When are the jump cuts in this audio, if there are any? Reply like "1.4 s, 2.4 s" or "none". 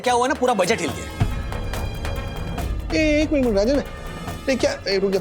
none